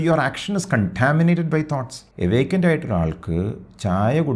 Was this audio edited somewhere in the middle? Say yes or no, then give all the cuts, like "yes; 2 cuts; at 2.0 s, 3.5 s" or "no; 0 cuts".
yes; 1 cut; at 2.0 s